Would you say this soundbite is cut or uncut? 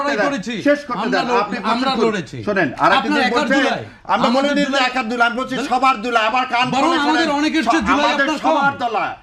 uncut